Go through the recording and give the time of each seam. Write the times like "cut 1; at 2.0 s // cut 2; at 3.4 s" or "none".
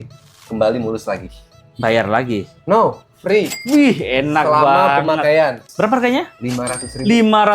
cut 1; at 5.7 s